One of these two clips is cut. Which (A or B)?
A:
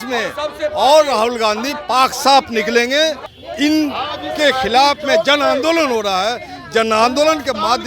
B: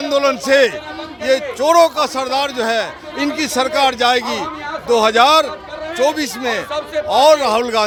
A